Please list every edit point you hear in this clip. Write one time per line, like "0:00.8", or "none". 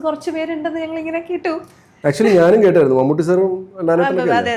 none